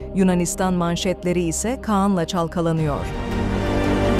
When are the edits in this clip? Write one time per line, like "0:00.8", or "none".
0:03.2